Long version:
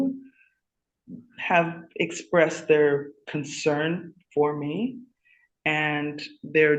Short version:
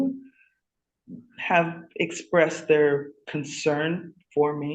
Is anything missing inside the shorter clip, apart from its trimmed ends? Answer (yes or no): no